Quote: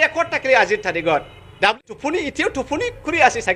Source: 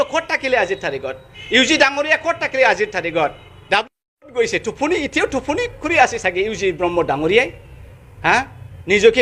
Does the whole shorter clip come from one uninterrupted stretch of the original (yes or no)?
no